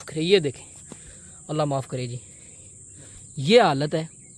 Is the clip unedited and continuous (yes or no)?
yes